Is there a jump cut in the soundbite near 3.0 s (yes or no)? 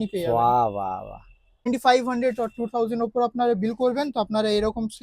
no